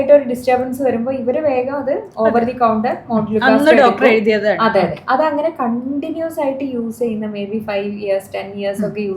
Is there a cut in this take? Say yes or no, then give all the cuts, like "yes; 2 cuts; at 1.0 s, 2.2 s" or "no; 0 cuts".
no; 0 cuts